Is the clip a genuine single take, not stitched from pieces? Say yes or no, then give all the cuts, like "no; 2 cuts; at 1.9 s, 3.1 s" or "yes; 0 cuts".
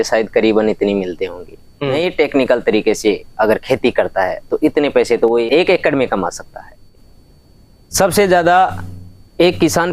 no; 3 cuts; at 2.0 s, 5.5 s, 6.8 s